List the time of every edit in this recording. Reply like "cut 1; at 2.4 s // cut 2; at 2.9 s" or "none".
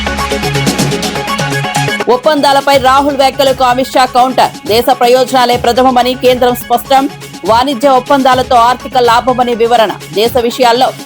cut 1; at 2.0 s